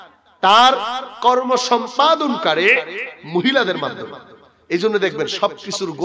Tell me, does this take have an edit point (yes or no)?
no